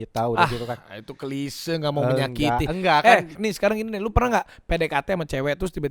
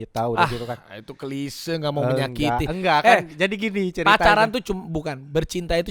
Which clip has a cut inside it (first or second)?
first